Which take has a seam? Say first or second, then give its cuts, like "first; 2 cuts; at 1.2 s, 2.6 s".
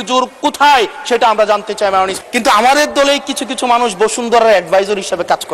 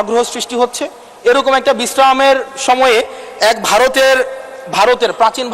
first; 1 cut; at 2.2 s